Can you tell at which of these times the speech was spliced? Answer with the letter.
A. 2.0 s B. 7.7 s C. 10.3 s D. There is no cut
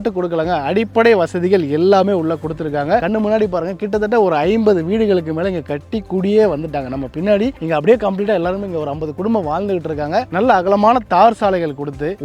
C